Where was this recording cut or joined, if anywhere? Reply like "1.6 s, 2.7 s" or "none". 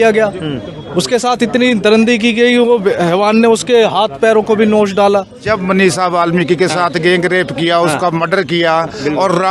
5.4 s